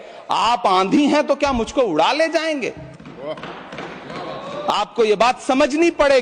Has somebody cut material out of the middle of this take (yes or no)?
no